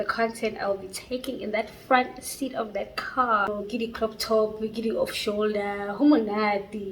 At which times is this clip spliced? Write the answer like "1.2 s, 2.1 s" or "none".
3.5 s